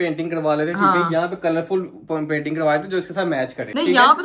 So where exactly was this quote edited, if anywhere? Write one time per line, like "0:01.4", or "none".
none